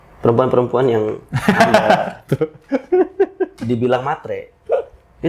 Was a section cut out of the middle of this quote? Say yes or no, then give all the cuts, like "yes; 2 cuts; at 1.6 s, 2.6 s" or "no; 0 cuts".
no; 0 cuts